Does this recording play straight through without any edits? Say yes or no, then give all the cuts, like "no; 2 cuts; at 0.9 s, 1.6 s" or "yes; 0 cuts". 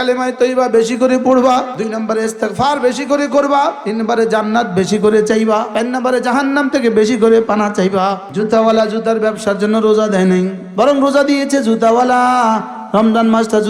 no; 5 cuts; at 1.7 s, 3.8 s, 5.7 s, 8.2 s, 10.6 s